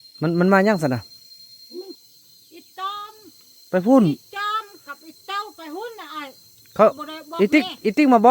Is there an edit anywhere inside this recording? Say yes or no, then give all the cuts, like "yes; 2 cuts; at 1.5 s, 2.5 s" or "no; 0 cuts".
yes; 1 cut; at 2.0 s